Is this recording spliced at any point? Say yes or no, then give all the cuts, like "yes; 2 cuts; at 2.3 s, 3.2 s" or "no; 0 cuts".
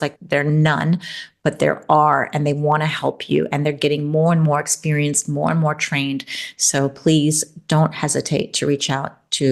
no; 0 cuts